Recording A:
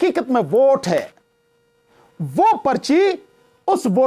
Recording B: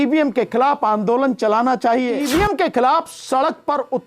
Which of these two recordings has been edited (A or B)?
B